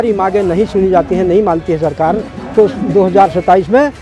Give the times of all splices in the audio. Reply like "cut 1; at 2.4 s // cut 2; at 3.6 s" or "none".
none